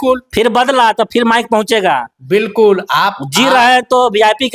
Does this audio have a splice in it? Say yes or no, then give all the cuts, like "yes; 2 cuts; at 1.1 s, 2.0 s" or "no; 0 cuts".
no; 0 cuts